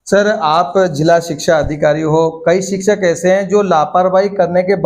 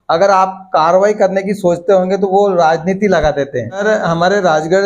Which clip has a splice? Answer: second; 1 cut; at 3.8 s

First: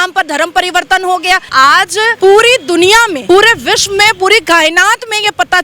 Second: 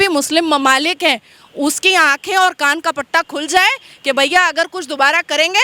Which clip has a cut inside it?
first; 2 cuts; at 1.6 s, 3.2 s

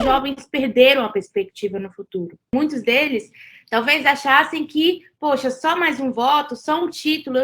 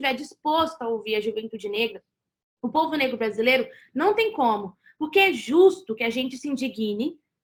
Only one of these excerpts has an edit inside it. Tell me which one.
first; 1 cut; at 2.5 s

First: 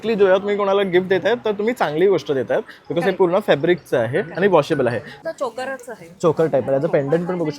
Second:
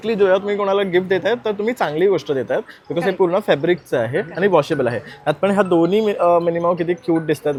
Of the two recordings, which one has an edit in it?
first; 1 cut; at 5.1 s

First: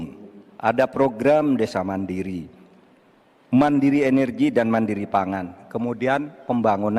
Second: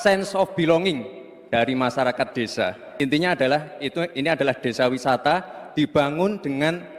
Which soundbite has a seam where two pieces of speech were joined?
second; 1 cut; at 2.8 s

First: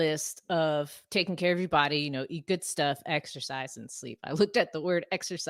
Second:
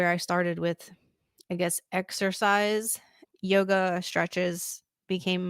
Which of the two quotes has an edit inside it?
second; 1 cut; at 3.2 s

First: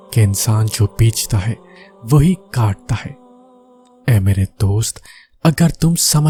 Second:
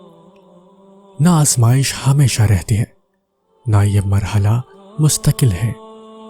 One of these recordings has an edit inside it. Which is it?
second; 1 cut; at 1.2 s

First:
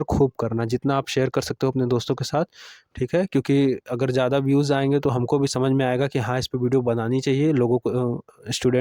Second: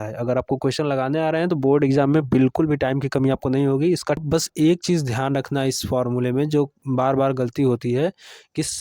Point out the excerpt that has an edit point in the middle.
second; 1 cut; at 4.2 s

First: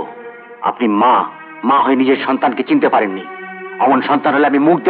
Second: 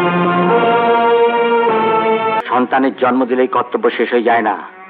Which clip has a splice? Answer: second; 1 cut; at 2.4 s

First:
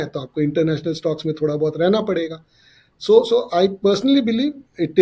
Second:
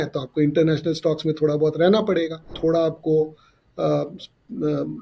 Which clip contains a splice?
second; 1 cut; at 2.6 s

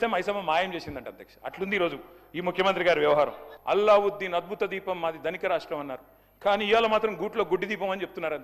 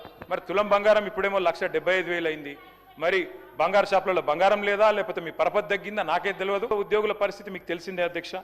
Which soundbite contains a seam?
second; 1 cut; at 6.7 s

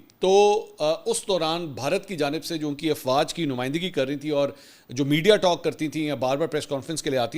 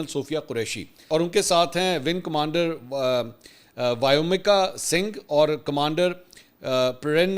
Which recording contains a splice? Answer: second; 1 cut; at 1.0 s

